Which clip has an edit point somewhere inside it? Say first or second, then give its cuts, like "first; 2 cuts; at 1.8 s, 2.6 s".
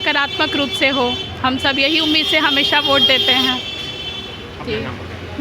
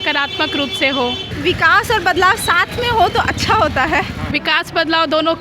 second; 2 cuts; at 1.3 s, 4.2 s